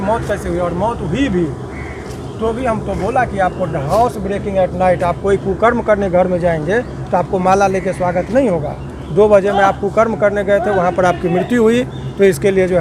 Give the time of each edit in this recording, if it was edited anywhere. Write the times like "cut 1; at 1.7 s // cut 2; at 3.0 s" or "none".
none